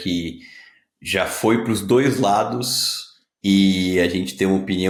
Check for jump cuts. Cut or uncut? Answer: uncut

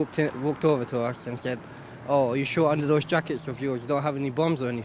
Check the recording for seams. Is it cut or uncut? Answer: uncut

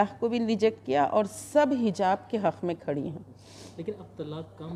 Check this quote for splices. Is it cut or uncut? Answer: uncut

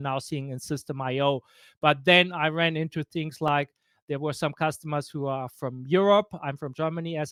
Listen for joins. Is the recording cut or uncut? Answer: uncut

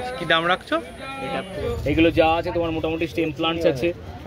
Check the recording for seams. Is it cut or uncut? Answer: cut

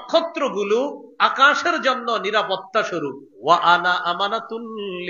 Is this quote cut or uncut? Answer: cut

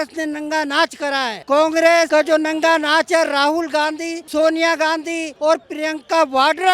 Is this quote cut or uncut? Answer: cut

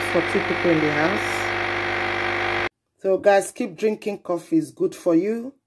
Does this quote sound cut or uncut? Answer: cut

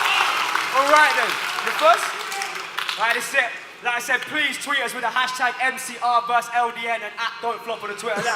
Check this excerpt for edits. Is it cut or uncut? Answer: cut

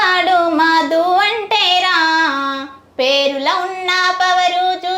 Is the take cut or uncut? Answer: uncut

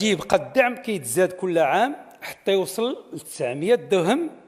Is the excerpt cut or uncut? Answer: uncut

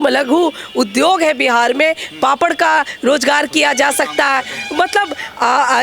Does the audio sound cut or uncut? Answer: uncut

